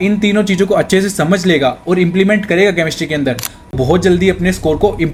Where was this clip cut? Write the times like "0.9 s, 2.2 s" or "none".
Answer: none